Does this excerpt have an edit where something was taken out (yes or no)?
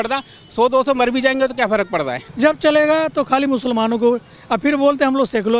yes